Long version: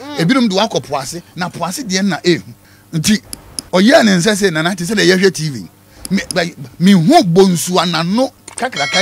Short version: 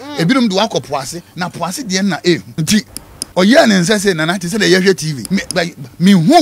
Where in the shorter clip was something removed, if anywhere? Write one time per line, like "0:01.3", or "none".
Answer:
0:02.5
0:05.1

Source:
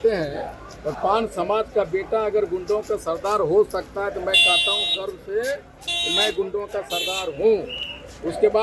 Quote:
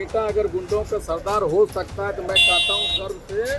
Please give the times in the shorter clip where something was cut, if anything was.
none

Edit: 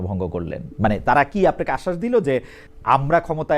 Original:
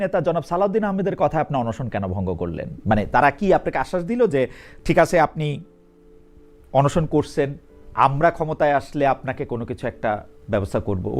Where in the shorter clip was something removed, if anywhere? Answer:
0:02.6

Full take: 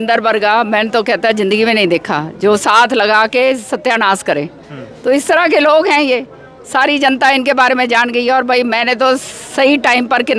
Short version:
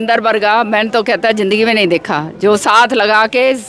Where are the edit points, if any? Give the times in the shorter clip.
none

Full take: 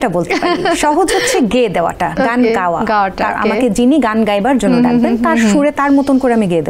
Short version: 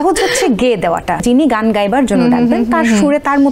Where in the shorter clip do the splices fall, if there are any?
0:01.2

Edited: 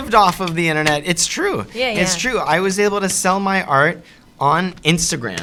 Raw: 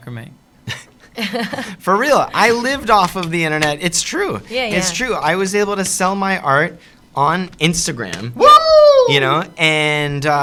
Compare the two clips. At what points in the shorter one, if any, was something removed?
none

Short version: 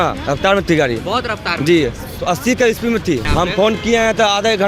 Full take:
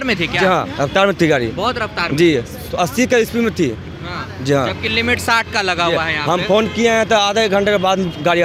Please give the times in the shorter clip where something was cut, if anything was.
0:03.3

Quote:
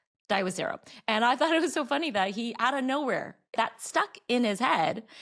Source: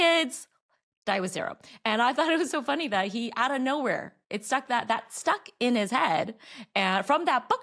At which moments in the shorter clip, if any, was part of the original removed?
0:03.5

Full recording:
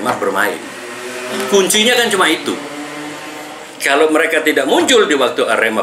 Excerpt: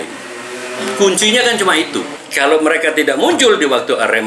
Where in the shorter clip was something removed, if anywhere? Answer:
0:02.2

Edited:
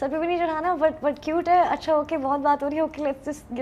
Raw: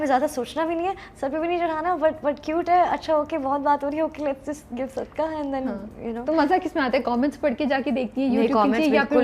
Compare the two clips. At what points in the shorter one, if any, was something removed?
none

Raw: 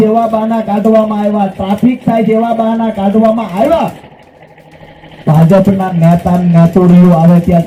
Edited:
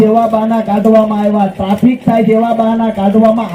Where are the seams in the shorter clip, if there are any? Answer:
none

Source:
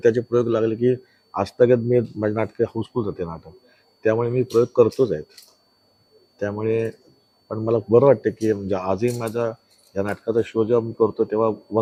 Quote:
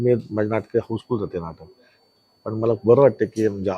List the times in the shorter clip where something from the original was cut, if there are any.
0:02.0

